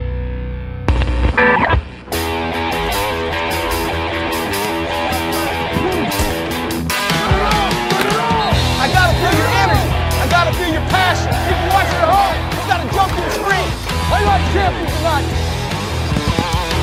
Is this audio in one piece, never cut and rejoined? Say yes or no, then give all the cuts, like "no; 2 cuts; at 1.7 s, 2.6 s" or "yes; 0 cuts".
yes; 0 cuts